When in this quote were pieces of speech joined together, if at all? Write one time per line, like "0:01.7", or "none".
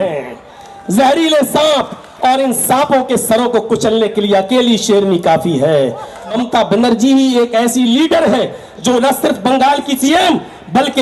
0:06.3
0:10.0